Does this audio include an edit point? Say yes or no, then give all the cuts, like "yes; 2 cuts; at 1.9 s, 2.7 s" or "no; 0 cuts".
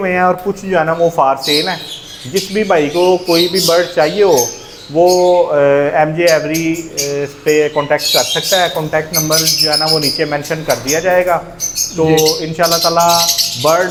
no; 0 cuts